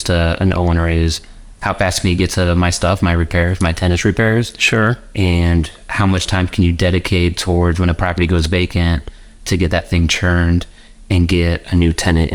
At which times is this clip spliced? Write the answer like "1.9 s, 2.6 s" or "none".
none